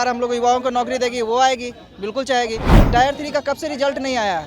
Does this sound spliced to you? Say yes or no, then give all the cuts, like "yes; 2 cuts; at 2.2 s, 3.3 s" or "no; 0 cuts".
yes; 1 cut; at 2.7 s